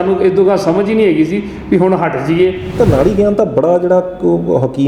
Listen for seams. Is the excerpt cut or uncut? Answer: cut